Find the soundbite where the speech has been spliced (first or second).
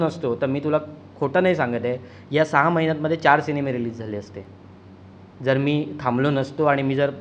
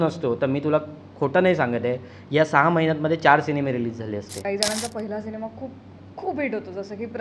second